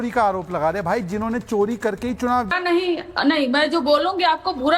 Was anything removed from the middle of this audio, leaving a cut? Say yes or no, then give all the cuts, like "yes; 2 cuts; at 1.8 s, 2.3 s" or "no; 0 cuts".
yes; 1 cut; at 2.5 s